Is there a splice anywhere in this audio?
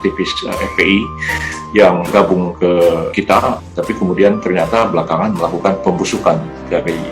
yes; 2 cuts; at 2.1 s, 3.3 s

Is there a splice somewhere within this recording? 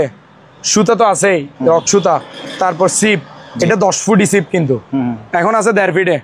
no; 0 cuts

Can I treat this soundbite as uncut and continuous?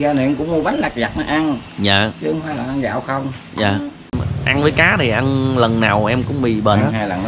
no; 1 cut; at 4.2 s

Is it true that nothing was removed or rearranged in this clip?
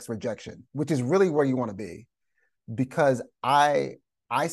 yes; 0 cuts

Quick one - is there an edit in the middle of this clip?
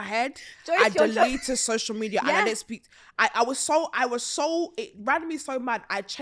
no; 0 cuts

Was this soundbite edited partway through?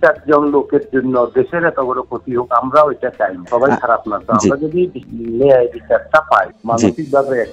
yes; 3 cuts; at 3.4 s, 5.0 s, 6.5 s

